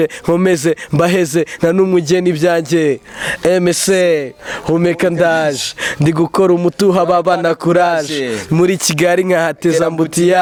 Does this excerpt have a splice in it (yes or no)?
no